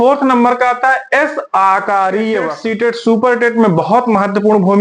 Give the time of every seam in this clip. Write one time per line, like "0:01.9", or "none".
0:02.6